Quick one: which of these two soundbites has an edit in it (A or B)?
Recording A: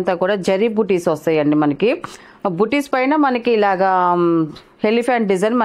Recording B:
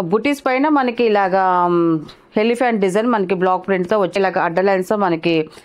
B